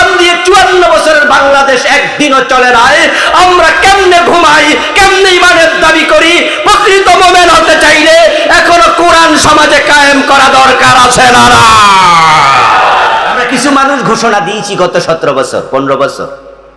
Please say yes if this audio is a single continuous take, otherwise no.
no